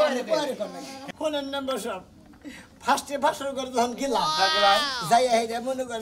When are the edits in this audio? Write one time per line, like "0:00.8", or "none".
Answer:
0:01.1